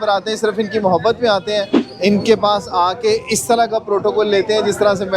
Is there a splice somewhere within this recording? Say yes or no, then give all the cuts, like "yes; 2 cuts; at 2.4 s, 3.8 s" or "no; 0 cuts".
yes; 1 cut; at 1.8 s